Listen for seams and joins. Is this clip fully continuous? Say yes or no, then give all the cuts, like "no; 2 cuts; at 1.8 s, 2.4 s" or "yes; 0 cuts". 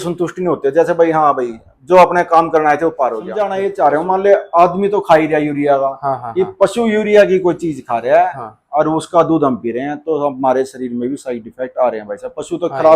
no; 1 cut; at 3.5 s